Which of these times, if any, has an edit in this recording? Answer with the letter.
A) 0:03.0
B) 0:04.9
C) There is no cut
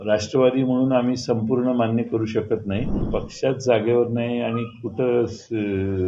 A